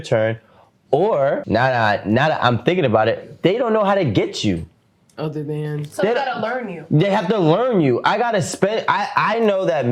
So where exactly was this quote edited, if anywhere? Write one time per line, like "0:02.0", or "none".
0:01.4

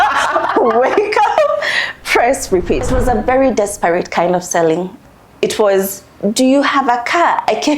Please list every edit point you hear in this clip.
0:02.9
0:05.0

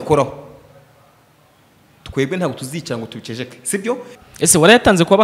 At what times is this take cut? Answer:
0:04.2

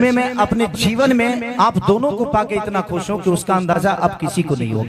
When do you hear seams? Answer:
none

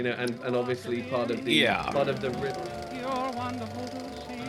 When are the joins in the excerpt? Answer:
0:02.3

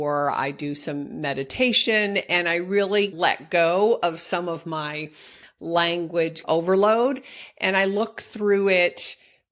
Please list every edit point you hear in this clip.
0:03.1
0:06.4

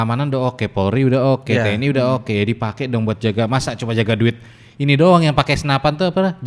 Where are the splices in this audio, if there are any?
none

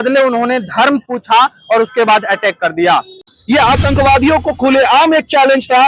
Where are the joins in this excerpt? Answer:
0:03.4

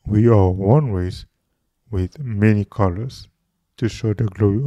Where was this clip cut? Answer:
none

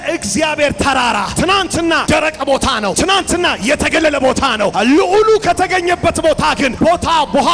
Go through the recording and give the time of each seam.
0:01.8
0:02.9
0:04.7
0:06.7

